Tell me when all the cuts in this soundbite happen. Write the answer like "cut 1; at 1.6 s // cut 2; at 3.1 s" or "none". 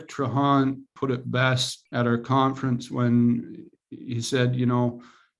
cut 1; at 0.9 s // cut 2; at 1.7 s